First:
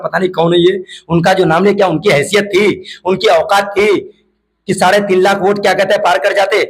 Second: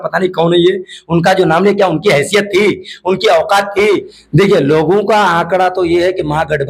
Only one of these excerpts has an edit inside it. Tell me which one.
second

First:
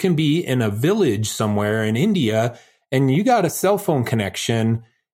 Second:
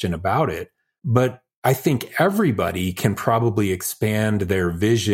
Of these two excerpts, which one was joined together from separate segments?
second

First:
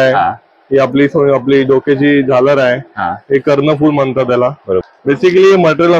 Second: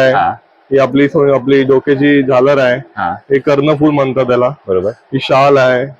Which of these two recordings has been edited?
first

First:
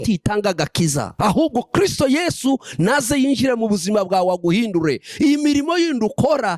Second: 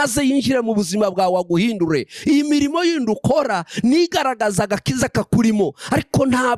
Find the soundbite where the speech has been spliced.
first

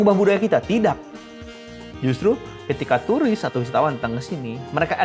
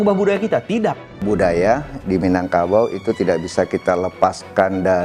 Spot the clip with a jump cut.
second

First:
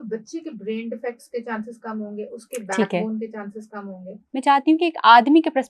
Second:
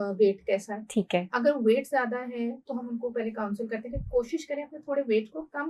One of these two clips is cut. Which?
first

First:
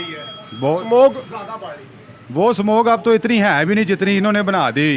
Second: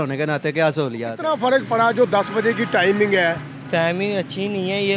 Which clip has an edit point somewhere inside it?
second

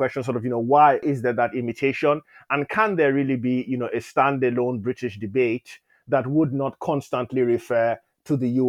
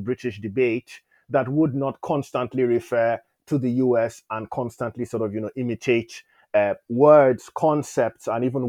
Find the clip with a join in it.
first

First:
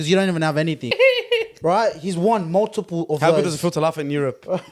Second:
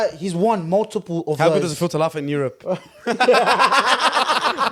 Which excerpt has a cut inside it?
first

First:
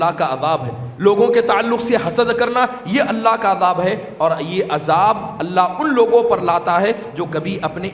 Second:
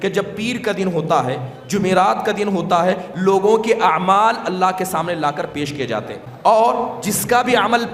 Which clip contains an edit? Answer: second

